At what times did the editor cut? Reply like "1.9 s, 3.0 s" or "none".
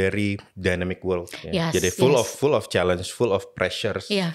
none